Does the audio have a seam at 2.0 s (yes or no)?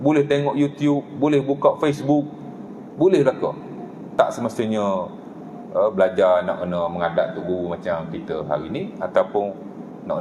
no